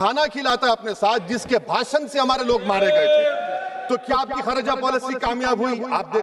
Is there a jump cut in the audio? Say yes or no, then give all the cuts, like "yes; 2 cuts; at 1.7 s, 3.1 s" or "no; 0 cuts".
no; 0 cuts